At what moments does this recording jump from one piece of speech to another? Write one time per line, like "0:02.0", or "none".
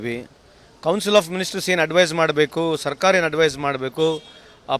0:01.4